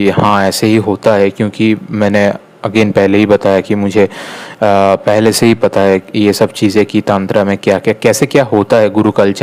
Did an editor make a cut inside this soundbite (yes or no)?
no